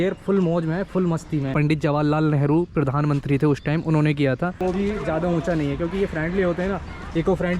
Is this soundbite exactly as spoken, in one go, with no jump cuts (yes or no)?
no